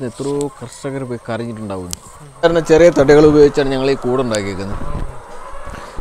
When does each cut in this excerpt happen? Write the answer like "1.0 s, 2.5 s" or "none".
2.4 s